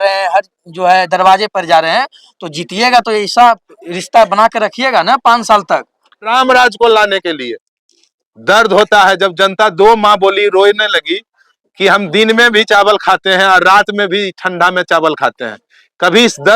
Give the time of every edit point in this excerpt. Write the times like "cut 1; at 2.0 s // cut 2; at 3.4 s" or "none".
cut 1; at 6.3 s

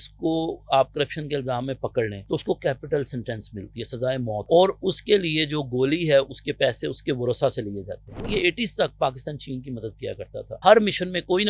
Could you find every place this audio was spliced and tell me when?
cut 1; at 2.2 s // cut 2; at 4.5 s // cut 3; at 8.1 s // cut 4; at 10.6 s

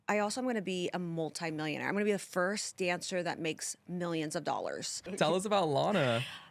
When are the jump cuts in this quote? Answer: cut 1; at 5.0 s

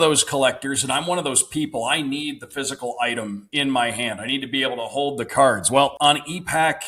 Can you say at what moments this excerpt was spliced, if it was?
cut 1; at 3.4 s // cut 2; at 5.9 s

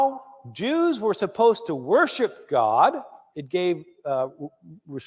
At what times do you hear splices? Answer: cut 1; at 3.9 s

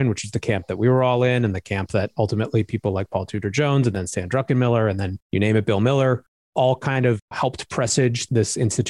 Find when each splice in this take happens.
cut 1; at 7.3 s

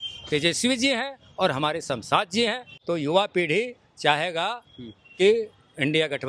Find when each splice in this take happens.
cut 1; at 2.7 s

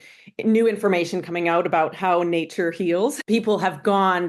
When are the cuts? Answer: cut 1; at 3.2 s

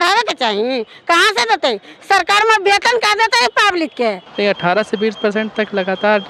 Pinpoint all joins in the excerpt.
cut 1; at 4.2 s

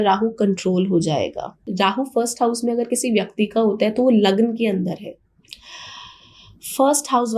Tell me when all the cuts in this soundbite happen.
cut 1; at 1.7 s

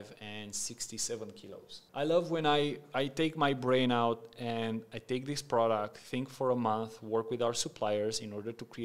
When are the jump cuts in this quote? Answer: cut 1; at 1.8 s

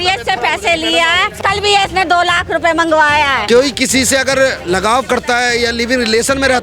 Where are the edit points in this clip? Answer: cut 1; at 1.4 s // cut 2; at 3.4 s

